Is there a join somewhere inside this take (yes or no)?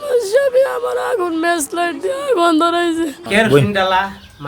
yes